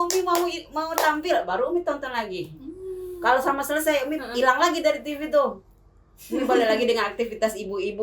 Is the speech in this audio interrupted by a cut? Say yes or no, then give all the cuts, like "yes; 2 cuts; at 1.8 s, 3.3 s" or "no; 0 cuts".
no; 0 cuts